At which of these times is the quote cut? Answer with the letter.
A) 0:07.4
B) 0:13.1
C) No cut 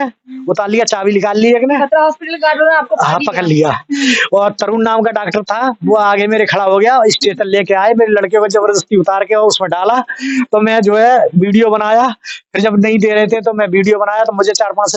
C